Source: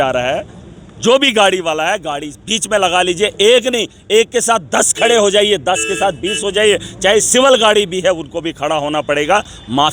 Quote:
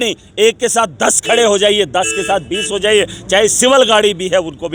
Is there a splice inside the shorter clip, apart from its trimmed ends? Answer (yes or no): no